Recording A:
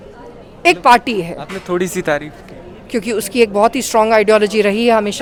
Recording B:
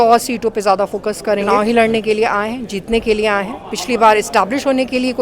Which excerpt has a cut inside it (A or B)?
B